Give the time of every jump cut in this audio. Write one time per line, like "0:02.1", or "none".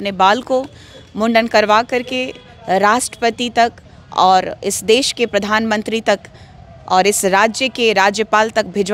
none